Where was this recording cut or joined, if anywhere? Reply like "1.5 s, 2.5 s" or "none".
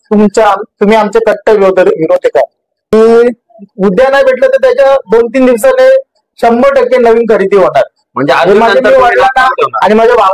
2.9 s